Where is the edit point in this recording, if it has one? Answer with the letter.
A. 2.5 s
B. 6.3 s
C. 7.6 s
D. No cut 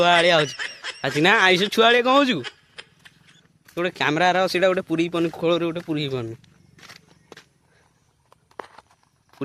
D